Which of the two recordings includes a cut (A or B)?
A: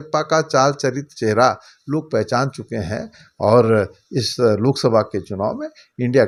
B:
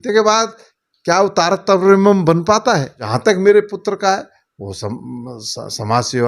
B